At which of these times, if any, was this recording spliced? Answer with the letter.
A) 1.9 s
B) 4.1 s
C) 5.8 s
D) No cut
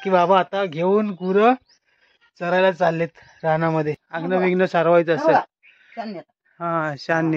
B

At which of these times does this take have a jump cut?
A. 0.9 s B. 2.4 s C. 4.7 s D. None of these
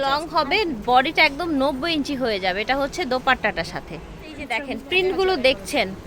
C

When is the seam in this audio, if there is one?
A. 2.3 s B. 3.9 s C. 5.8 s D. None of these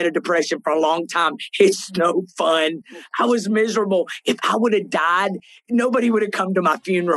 D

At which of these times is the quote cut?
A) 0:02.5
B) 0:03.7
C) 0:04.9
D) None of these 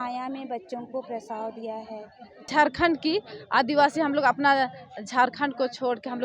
A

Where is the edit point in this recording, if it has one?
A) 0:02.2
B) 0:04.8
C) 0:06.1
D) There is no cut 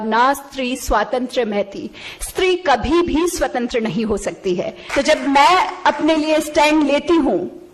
B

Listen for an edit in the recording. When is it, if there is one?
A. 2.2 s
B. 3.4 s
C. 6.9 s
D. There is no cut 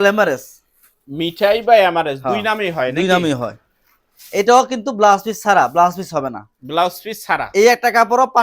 D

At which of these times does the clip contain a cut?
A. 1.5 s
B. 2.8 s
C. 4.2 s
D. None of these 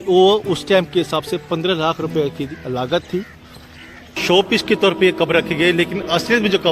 C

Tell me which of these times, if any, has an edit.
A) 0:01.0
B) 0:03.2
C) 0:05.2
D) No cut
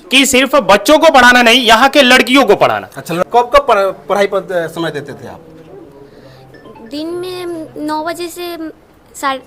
B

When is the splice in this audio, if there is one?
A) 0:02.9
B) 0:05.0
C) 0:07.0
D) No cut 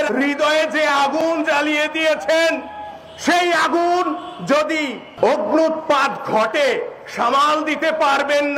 B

